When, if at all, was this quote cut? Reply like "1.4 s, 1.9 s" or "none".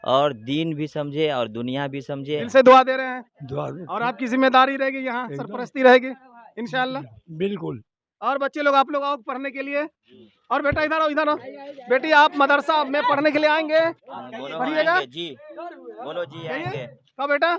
2.4 s